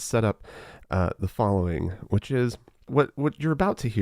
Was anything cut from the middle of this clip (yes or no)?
yes